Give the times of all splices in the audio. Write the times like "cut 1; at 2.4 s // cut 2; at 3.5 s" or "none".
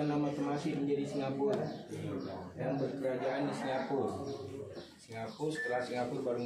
none